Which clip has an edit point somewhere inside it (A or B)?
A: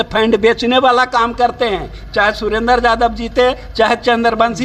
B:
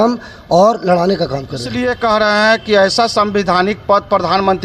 B